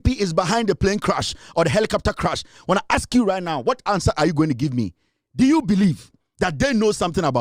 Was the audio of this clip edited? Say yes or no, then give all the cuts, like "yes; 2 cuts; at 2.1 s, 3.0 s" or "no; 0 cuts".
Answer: no; 0 cuts